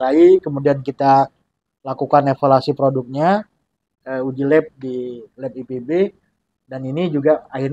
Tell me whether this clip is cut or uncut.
uncut